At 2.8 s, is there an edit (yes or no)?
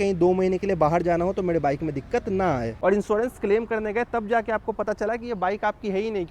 yes